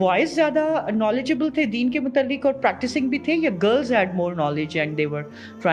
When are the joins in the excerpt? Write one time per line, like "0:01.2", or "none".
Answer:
none